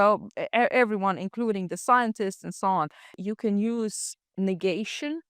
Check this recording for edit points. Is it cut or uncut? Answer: cut